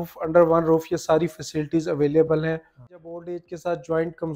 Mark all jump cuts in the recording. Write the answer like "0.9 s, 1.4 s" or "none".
2.8 s